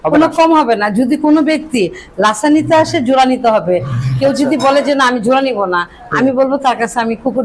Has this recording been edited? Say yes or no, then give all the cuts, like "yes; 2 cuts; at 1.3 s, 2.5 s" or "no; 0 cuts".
no; 0 cuts